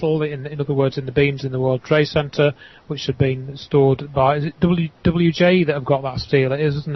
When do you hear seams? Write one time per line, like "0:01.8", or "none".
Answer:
none